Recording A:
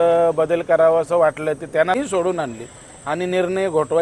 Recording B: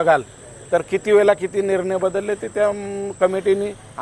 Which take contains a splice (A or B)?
A